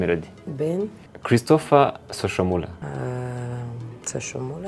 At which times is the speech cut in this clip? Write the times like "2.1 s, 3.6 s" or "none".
1.1 s, 2.8 s